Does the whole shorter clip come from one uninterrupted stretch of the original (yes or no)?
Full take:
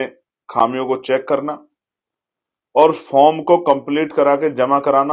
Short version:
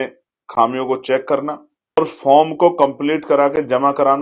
no